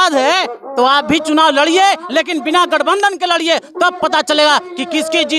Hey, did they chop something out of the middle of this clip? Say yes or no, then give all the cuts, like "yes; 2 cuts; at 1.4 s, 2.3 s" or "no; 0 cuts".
no; 0 cuts